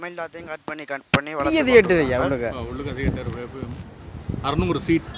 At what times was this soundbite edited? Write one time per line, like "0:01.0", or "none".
0:01.6